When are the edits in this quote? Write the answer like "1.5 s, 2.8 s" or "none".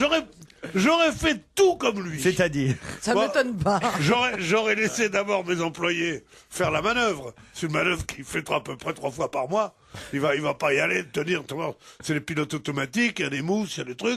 12.3 s